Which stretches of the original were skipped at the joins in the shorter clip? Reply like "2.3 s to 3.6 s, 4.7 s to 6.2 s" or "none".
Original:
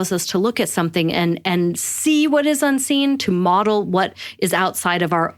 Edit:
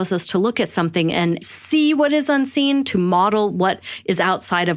1.4 s to 1.8 s